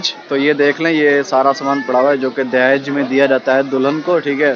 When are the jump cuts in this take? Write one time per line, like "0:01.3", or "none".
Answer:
none